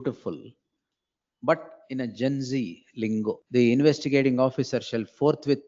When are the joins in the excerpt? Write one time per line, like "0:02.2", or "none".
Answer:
0:03.4